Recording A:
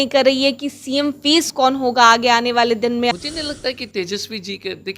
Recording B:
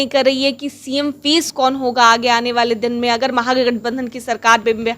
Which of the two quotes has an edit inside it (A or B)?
A